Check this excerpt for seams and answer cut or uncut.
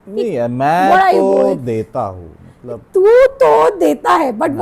uncut